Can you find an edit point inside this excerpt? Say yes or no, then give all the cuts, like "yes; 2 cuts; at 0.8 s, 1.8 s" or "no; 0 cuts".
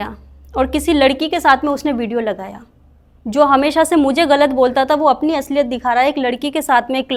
no; 0 cuts